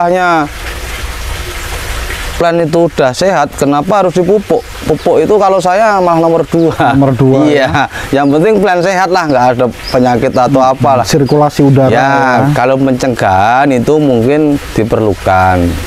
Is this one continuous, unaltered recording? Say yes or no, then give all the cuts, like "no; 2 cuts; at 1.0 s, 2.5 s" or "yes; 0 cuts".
yes; 0 cuts